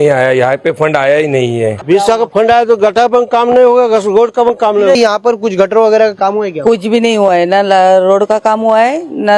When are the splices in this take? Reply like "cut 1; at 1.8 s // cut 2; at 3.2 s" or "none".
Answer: cut 1; at 1.8 s // cut 2; at 4.9 s